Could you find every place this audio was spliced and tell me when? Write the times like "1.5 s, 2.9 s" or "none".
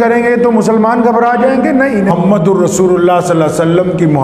2.1 s